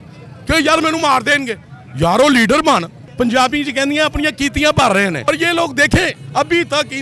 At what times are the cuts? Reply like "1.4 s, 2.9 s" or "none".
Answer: 3.0 s, 5.2 s